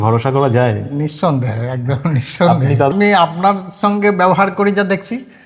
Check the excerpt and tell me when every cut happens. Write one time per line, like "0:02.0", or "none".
0:02.9